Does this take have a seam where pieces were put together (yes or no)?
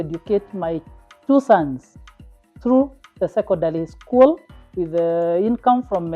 no